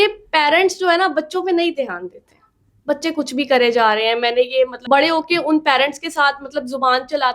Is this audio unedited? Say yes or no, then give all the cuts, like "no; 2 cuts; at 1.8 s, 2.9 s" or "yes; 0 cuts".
no; 1 cut; at 4.8 s